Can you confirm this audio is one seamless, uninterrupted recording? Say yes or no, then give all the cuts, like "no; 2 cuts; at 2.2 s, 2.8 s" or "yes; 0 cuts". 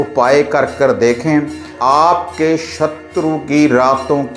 no; 1 cut; at 1.8 s